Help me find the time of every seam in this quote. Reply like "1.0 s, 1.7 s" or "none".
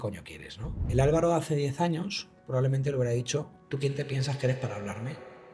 0.8 s, 3.6 s